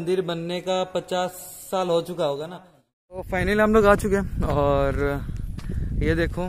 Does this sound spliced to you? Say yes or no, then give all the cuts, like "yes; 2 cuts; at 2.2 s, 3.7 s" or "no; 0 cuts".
yes; 1 cut; at 3.4 s